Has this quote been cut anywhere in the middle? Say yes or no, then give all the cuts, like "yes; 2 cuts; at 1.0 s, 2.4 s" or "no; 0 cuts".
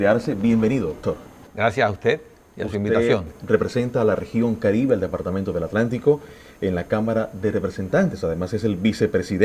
no; 0 cuts